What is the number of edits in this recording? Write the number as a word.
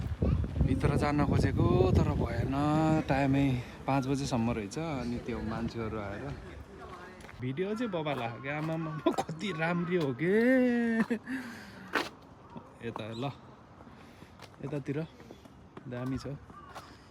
one